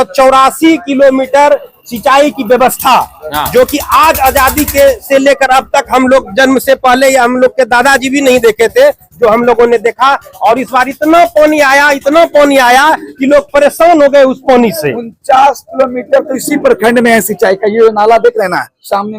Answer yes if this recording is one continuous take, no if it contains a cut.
yes